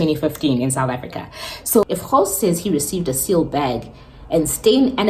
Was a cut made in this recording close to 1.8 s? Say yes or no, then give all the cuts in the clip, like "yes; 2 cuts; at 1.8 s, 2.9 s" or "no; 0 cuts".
yes; 1 cut; at 1.8 s